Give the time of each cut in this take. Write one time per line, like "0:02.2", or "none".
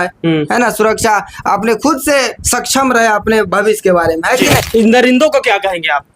0:04.6